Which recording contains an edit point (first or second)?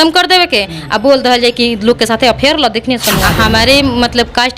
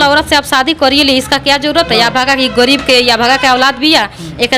first